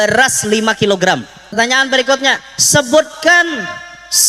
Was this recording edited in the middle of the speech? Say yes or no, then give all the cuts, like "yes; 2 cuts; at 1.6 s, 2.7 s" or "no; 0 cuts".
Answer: yes; 1 cut; at 1.5 s